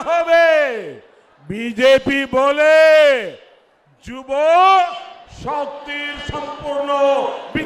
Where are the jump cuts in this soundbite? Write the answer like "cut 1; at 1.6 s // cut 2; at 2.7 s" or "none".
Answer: none